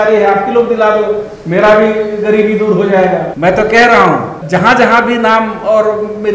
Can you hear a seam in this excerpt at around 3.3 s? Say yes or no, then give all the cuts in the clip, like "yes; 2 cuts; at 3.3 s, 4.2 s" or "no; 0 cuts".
yes; 2 cuts; at 3.3 s, 4.4 s